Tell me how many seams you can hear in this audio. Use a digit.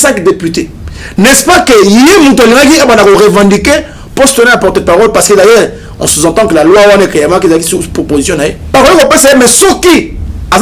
1